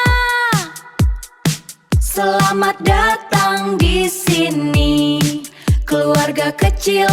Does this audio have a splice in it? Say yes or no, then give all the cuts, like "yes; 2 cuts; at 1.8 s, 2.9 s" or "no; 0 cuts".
no; 0 cuts